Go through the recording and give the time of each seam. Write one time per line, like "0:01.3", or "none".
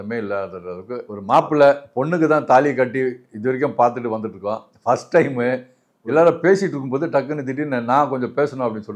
0:01.1
0:05.7